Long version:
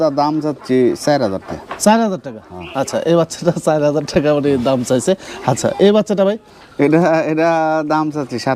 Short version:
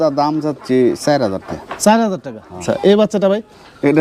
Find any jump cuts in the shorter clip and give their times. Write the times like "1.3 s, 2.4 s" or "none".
2.6 s

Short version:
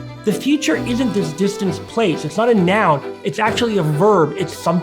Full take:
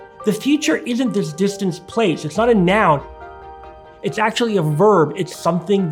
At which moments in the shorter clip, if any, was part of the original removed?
3.2 s

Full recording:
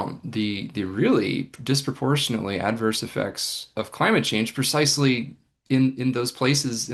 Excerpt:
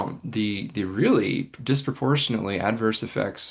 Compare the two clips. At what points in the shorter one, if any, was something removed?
none

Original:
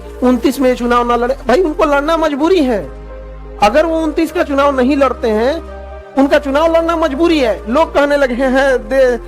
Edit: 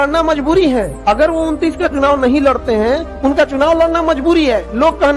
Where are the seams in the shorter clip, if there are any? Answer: 0.9 s, 3.1 s

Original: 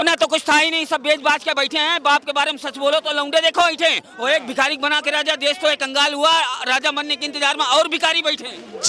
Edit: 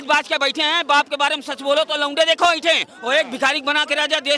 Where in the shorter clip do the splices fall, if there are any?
none

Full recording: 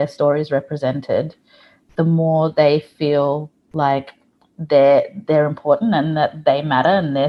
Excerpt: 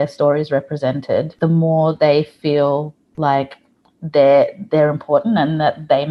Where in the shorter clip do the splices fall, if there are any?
1.3 s

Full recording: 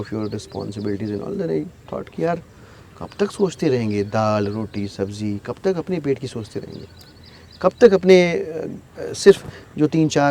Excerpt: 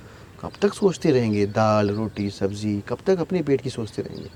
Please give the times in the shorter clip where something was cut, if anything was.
none

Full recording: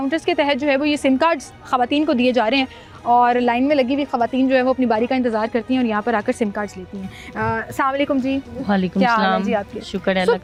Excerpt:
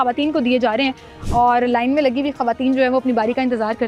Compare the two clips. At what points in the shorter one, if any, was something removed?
none

